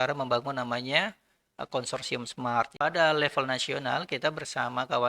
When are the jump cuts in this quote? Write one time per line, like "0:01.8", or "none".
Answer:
0:02.7